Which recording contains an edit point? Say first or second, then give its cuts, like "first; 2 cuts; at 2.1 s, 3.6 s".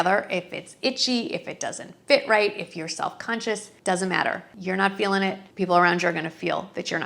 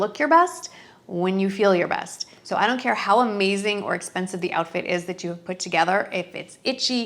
first; 2 cuts; at 4.5 s, 5.4 s